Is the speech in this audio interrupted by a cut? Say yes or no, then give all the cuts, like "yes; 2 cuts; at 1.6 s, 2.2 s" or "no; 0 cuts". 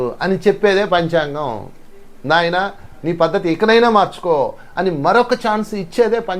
no; 0 cuts